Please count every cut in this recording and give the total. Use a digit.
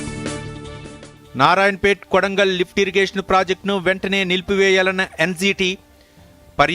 1